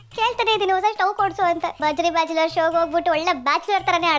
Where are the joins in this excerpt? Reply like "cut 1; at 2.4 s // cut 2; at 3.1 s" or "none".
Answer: cut 1; at 1.7 s